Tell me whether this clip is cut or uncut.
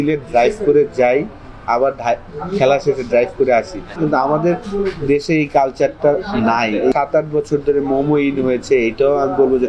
cut